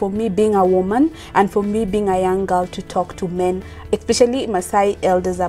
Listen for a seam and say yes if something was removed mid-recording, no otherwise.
no